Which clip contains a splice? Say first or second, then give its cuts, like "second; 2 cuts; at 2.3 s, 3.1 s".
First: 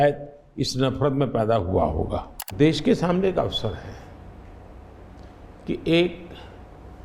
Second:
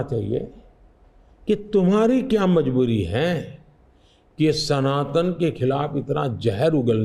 first; 1 cut; at 2.5 s